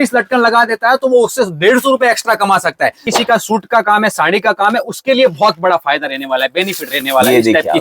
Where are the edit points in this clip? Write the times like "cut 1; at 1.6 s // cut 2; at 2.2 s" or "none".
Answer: cut 1; at 3.1 s